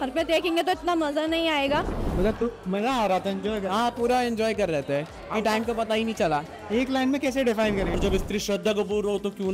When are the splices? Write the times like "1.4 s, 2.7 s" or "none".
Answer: 2.0 s, 8.0 s